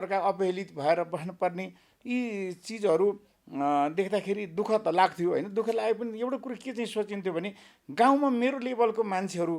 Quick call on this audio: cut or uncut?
uncut